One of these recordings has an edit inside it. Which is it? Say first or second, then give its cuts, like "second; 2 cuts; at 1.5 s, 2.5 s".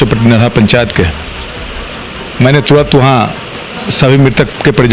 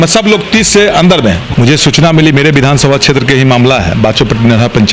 second; 1 cut; at 1.5 s